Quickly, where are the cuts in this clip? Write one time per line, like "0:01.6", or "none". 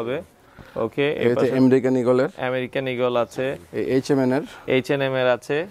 none